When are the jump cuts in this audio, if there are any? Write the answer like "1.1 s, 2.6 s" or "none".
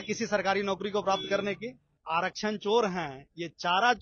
1.9 s